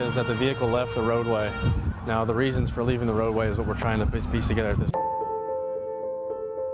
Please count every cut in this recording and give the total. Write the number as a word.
one